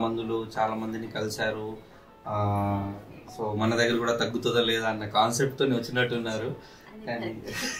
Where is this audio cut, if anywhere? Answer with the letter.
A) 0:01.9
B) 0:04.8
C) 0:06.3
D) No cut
D